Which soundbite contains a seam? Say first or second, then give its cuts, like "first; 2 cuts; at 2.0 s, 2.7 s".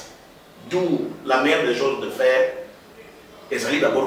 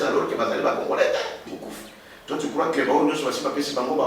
second; 1 cut; at 1.4 s